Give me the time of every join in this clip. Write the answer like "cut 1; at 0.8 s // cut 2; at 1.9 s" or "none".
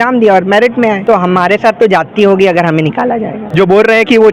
cut 1; at 1.0 s // cut 2; at 3.4 s